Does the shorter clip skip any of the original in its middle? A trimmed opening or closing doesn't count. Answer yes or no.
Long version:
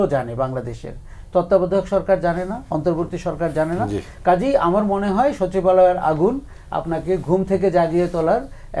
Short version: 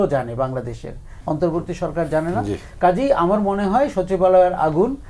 yes